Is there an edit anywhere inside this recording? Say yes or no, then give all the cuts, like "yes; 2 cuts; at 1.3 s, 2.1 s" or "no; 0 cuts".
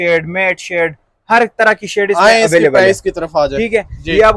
no; 0 cuts